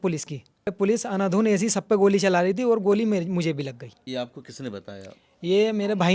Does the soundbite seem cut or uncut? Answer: cut